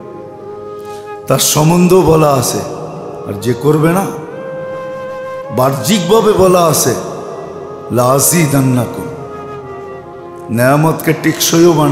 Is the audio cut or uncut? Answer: cut